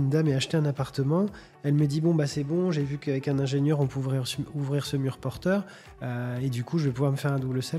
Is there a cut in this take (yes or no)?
no